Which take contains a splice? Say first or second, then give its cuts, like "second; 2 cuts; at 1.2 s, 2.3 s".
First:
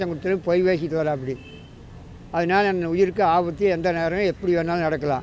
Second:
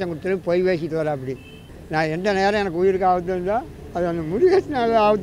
second; 1 cut; at 1.8 s